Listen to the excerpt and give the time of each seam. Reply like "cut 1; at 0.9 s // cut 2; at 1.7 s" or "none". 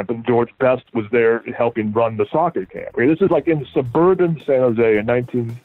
none